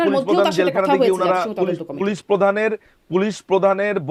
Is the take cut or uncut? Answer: uncut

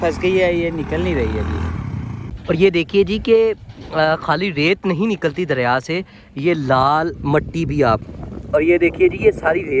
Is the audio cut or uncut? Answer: cut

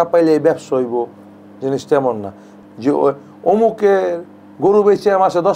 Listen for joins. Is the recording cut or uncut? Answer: cut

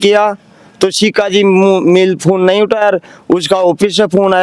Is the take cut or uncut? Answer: uncut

